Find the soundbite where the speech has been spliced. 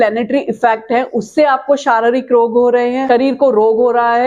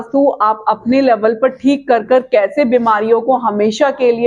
first; 1 cut; at 3.1 s

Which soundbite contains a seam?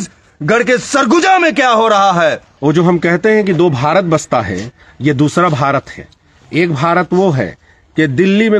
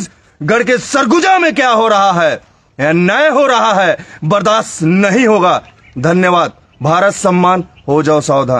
first; 1 cut; at 2.5 s

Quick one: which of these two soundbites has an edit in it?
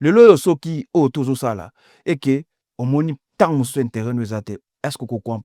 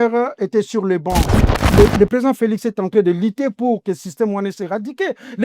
second; 1 cut; at 1.7 s

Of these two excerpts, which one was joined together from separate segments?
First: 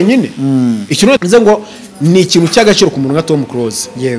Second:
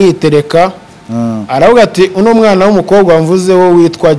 first; 1 cut; at 1.2 s

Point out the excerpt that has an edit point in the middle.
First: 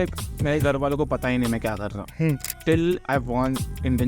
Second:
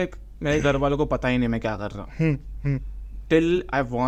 first; 1 cut; at 2.5 s

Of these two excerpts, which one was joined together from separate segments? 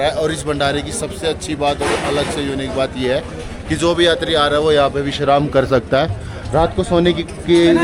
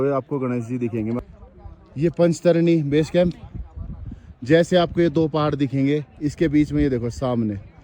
second; 1 cut; at 1.2 s

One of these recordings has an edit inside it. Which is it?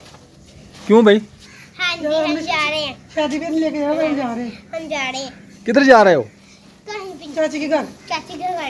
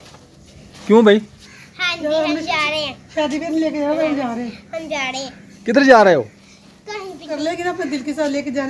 second; 1 cut; at 7.3 s

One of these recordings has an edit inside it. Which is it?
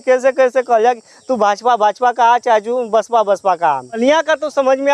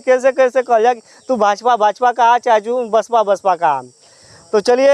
first; 1 cut; at 4.0 s

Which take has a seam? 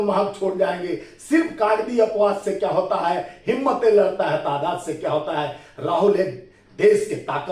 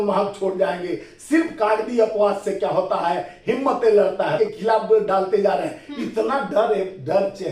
second; 1 cut; at 4.4 s

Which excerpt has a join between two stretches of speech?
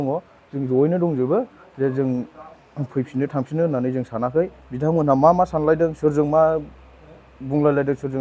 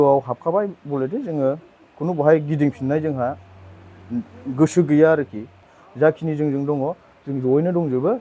second; 1 cut; at 5.8 s

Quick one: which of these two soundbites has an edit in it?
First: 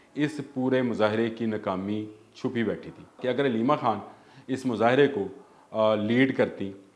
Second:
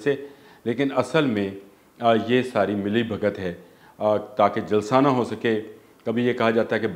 first; 1 cut; at 3.2 s

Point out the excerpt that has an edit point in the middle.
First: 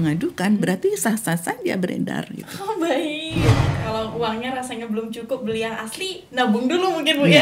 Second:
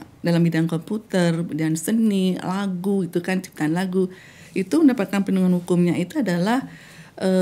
first; 1 cut; at 3.6 s

